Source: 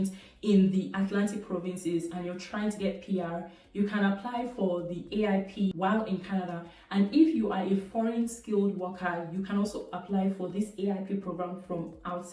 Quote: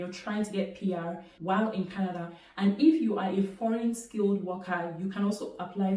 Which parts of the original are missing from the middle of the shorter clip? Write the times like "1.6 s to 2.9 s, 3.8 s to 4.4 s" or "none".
3.7 s to 5.7 s